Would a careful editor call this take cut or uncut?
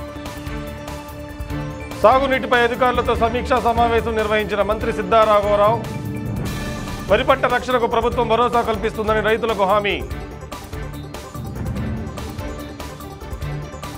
cut